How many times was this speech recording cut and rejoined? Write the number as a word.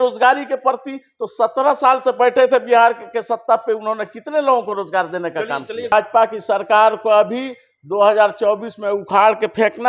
one